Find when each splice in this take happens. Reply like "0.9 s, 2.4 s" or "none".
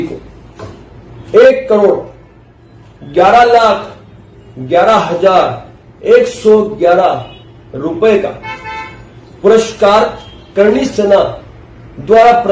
none